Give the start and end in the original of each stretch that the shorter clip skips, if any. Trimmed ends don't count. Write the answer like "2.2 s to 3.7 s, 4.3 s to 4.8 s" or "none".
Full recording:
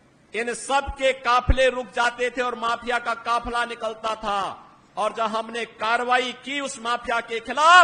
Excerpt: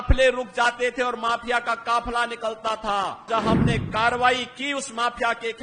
4.7 s to 5.1 s

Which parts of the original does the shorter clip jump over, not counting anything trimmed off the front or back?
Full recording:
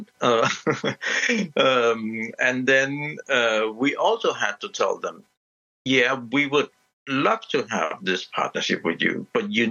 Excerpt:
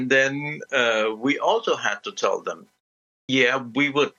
none

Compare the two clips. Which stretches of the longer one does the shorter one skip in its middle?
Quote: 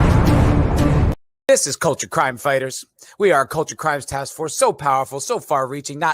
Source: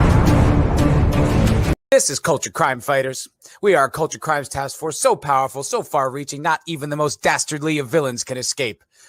1.1 s to 1.6 s

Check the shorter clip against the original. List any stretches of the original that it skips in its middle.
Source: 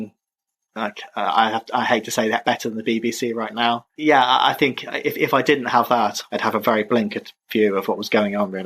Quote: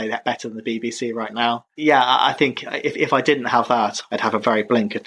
none

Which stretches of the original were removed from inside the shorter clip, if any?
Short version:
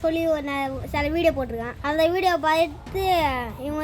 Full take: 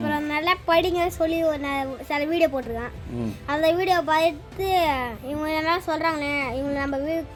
2.9 s to 3.4 s

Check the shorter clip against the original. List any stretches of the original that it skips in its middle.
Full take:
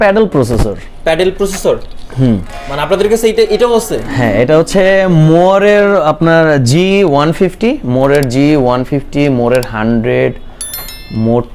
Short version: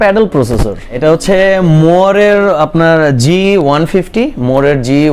1.0 s to 4.4 s

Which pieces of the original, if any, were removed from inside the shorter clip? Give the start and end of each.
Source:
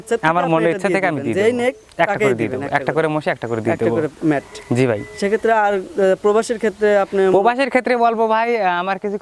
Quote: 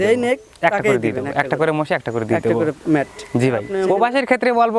5.1 s to 7.1 s

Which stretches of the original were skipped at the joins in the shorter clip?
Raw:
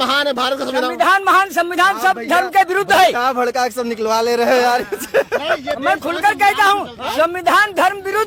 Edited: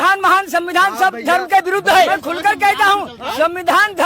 3.1 s to 5.9 s

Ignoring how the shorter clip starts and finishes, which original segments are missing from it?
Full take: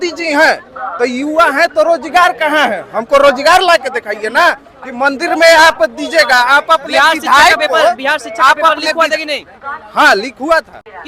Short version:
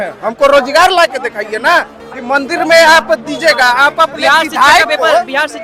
none

